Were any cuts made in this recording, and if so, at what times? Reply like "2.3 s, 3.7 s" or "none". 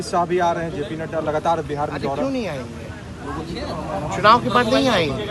none